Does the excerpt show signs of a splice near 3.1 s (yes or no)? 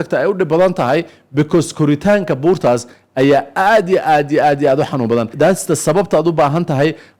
no